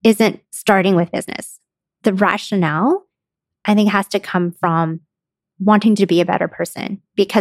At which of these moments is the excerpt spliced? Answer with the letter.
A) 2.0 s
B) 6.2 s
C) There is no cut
A